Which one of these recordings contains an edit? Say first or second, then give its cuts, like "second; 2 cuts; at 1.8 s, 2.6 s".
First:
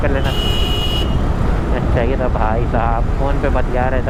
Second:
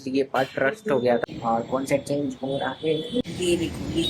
second; 2 cuts; at 1.2 s, 3.2 s